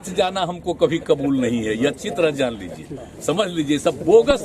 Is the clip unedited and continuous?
yes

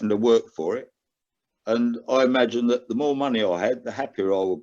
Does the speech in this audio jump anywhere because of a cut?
no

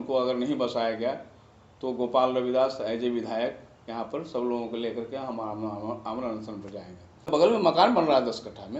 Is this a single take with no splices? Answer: no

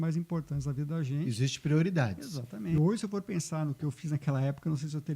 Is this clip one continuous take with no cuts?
no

